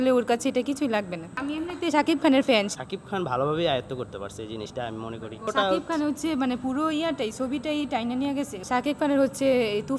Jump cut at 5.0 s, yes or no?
no